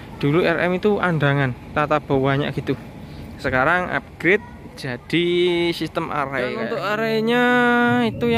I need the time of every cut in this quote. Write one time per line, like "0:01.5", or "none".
0:06.7